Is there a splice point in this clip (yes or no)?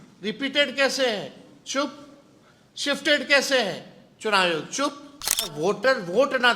yes